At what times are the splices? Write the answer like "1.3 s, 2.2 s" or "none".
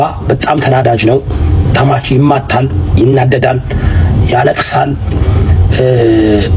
none